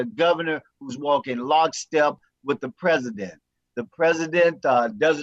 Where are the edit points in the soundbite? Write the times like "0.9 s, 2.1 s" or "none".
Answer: none